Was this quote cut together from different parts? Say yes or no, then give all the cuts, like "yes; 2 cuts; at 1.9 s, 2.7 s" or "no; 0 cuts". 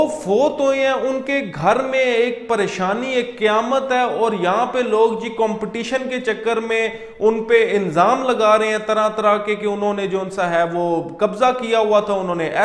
no; 0 cuts